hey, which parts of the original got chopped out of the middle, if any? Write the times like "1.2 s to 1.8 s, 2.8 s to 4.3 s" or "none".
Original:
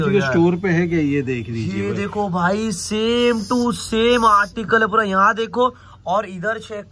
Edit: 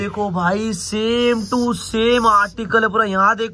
none